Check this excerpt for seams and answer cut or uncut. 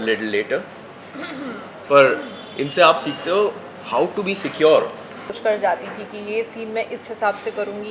cut